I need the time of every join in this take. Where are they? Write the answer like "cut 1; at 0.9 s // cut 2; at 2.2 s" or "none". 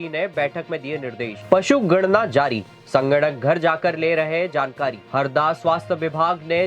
cut 1; at 1.4 s // cut 2; at 5.0 s